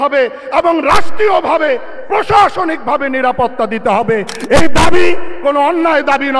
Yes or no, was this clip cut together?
no